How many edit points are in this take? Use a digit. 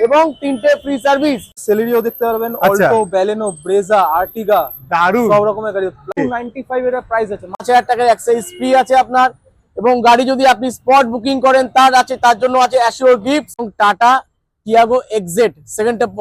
4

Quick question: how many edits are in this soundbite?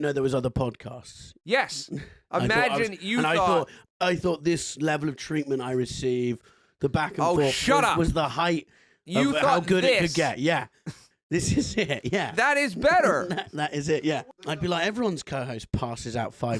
1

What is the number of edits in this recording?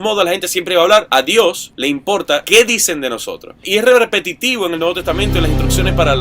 2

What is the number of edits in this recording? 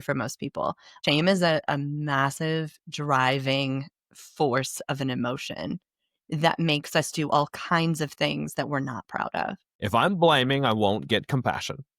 2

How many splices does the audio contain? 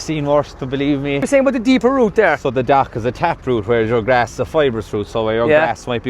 1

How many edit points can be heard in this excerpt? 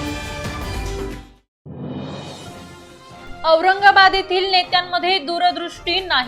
2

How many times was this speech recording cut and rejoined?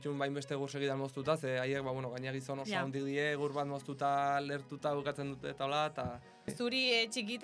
1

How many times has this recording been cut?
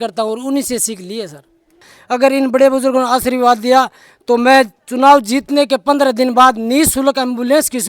1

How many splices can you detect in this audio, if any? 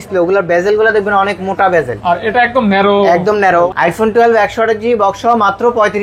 1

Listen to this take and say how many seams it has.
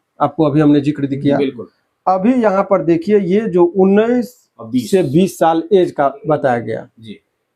0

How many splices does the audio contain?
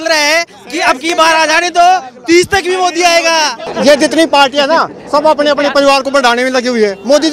1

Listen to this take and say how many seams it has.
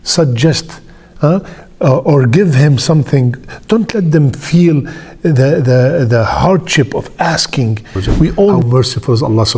1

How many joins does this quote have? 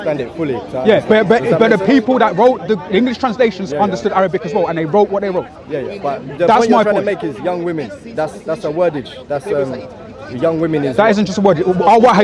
0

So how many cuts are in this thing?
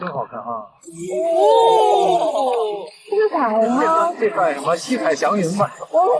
0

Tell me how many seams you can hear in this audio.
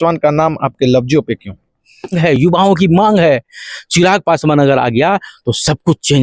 1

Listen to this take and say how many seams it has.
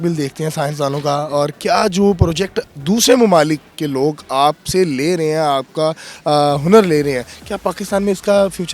0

